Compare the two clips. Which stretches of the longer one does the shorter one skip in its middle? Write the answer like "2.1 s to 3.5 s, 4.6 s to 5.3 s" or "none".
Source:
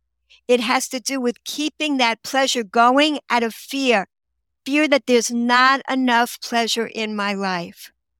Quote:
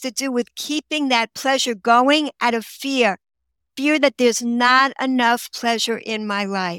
none